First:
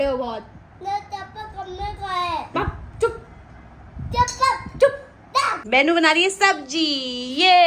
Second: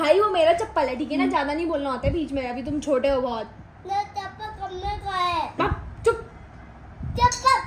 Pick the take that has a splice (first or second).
first